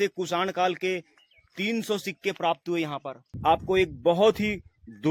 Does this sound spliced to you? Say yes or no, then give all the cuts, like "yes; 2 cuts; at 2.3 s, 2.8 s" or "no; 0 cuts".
yes; 1 cut; at 3.2 s